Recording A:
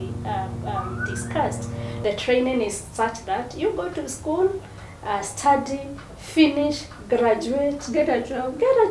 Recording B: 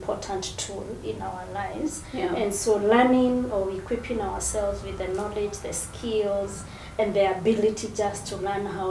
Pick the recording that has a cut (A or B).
A